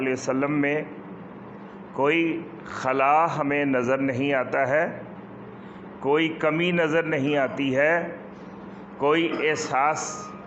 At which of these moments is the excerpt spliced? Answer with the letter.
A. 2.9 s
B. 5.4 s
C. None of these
C